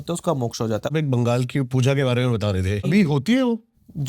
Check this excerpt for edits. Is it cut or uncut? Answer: cut